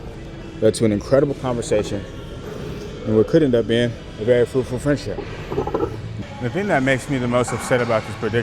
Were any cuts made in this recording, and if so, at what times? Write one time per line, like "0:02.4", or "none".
0:06.2